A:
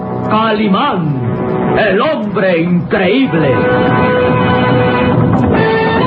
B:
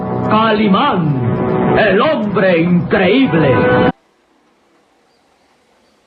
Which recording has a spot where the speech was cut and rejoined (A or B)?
A